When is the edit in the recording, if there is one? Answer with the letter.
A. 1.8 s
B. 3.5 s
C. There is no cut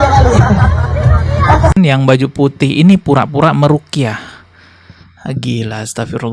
A